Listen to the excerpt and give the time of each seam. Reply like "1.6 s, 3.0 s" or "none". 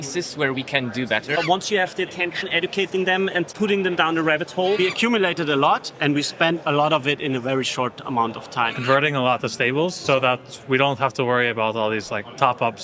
1.4 s, 3.5 s, 4.8 s, 8.8 s, 10.0 s